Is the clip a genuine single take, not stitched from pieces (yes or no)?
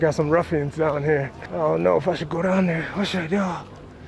no